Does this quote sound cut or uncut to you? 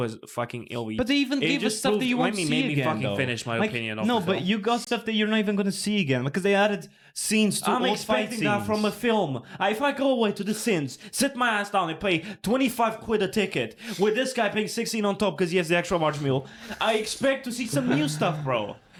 uncut